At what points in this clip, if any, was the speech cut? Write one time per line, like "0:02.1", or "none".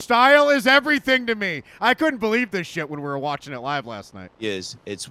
none